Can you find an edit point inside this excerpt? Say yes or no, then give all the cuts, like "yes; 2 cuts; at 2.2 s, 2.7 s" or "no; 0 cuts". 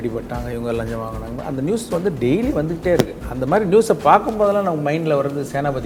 no; 0 cuts